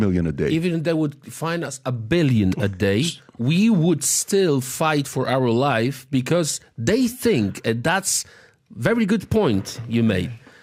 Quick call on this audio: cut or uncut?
uncut